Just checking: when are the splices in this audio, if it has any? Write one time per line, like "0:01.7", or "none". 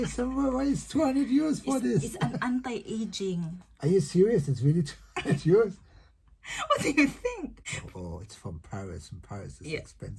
0:08.1